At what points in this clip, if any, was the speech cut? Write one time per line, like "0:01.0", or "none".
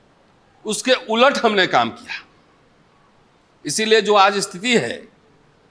none